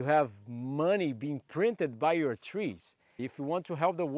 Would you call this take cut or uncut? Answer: cut